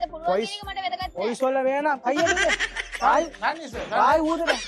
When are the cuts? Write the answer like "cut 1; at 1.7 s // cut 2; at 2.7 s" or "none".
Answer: cut 1; at 2.8 s